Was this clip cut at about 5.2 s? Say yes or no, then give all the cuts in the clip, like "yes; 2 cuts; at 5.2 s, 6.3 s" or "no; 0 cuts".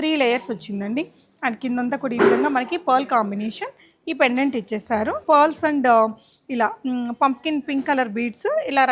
yes; 1 cut; at 5.2 s